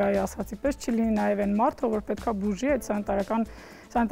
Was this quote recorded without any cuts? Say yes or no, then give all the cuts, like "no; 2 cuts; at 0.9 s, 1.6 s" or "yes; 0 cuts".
yes; 0 cuts